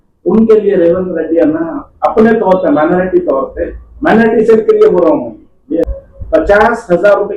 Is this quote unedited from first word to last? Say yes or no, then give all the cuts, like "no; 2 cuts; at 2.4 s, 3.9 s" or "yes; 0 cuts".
no; 1 cut; at 5.9 s